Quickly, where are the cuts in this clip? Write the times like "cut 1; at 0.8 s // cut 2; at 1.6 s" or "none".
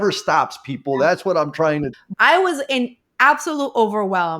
cut 1; at 2.0 s

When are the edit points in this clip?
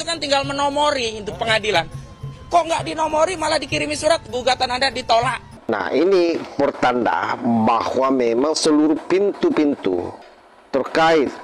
cut 1; at 5.5 s

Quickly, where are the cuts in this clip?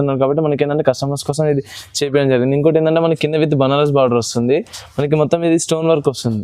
none

